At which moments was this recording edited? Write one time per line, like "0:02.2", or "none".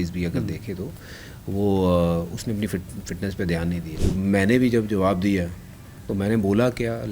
0:03.9